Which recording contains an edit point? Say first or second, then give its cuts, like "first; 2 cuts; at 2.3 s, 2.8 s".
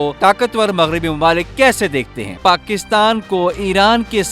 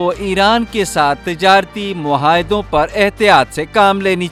first; 1 cut; at 2.3 s